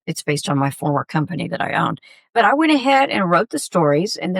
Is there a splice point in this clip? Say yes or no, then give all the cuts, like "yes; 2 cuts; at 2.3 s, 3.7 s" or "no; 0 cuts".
yes; 1 cut; at 2.2 s